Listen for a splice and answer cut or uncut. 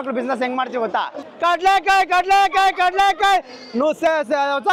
cut